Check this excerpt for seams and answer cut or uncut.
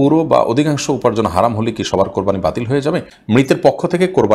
cut